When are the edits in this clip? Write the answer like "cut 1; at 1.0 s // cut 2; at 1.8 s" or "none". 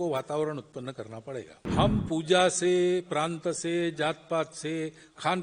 cut 1; at 1.6 s